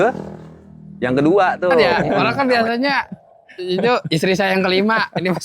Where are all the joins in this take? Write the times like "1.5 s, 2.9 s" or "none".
1.9 s